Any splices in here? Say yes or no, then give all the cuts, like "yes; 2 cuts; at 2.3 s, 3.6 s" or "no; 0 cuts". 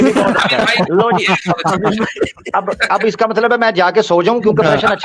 no; 0 cuts